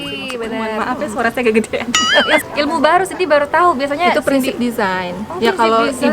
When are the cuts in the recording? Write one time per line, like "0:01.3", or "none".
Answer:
0:02.5